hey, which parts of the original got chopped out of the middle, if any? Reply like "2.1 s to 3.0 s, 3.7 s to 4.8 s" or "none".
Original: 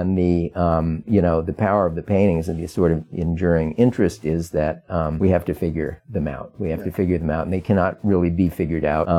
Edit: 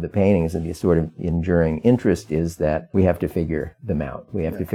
4.8 s to 5.1 s